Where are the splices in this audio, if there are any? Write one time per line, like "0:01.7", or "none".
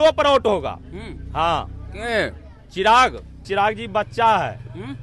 0:03.4